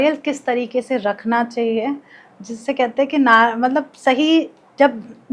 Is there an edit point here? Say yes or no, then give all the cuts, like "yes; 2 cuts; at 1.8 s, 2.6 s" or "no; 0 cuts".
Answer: no; 0 cuts